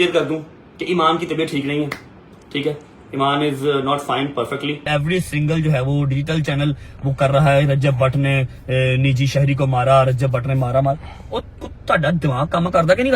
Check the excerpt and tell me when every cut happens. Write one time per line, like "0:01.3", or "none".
0:04.9